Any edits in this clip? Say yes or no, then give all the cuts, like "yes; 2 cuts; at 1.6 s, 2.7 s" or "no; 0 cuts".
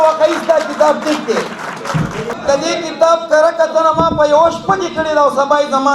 yes; 1 cut; at 2.4 s